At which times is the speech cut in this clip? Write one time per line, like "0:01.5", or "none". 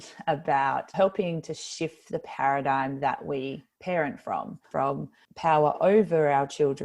0:00.9
0:04.6